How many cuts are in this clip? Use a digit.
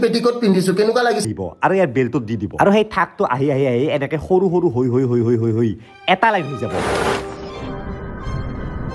1